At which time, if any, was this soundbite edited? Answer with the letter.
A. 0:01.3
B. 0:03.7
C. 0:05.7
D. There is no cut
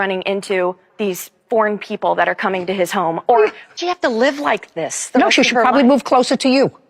B